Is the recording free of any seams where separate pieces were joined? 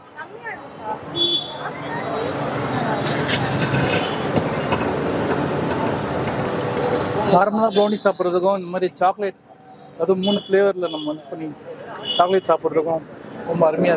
yes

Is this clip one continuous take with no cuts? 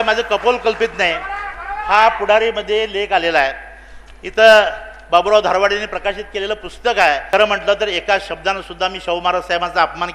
no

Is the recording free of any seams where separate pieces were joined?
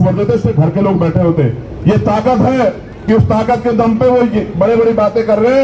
yes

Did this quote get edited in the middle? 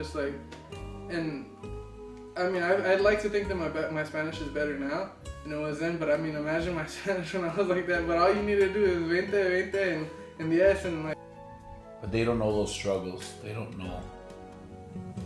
yes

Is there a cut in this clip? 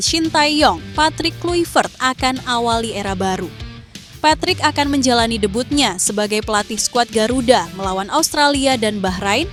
no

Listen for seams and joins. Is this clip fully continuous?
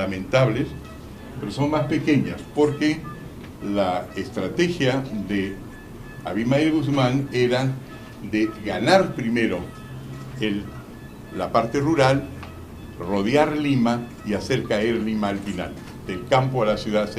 no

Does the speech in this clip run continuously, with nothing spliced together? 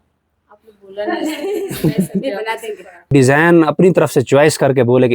no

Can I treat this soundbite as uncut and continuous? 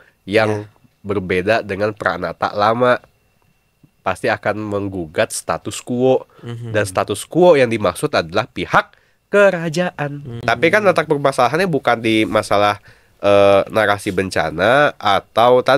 no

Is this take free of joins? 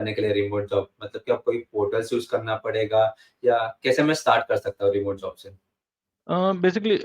yes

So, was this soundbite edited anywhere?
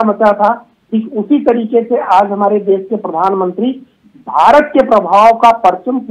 no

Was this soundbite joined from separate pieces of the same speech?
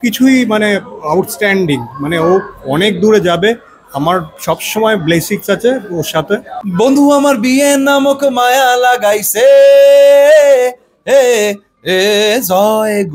yes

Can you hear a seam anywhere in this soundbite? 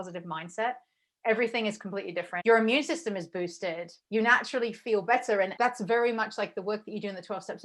yes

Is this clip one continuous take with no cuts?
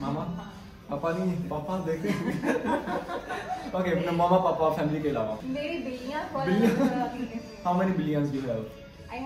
yes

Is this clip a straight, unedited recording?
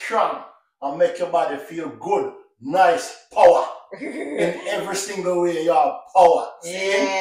yes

